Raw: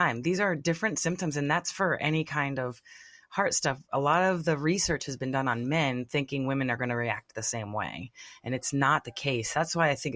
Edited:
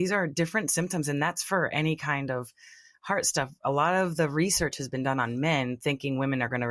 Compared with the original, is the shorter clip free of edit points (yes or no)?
yes